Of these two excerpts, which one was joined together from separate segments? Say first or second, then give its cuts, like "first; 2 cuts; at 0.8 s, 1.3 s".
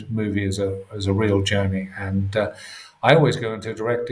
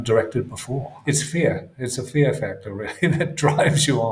second; 1 cut; at 0.9 s